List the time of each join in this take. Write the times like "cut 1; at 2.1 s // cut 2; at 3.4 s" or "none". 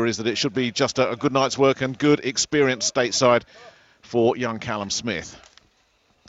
cut 1; at 2.0 s